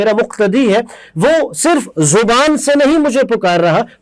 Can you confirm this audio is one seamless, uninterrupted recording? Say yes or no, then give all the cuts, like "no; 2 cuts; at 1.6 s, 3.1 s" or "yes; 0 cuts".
yes; 0 cuts